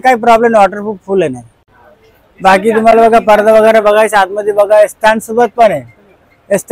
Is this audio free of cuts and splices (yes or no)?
yes